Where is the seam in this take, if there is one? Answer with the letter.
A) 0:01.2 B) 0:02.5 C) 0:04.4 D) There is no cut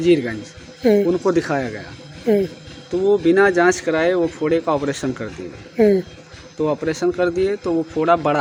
D